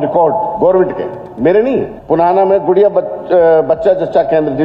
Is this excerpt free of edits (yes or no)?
no